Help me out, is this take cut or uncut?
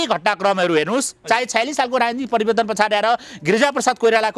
uncut